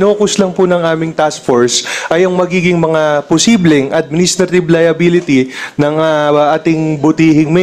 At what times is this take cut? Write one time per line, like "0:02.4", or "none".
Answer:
none